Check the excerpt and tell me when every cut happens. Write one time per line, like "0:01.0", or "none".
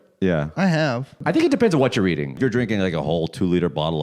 0:01.2
0:02.3